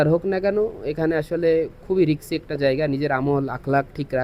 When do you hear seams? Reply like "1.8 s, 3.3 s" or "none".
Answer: none